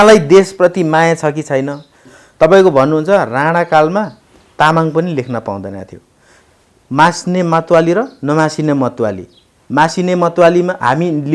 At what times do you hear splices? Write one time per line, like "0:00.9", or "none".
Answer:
0:02.0